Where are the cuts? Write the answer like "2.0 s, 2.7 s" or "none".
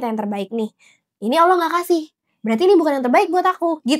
none